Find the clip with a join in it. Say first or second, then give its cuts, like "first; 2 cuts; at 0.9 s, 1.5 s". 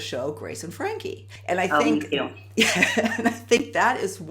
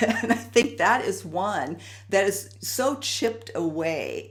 first; 1 cut; at 1.3 s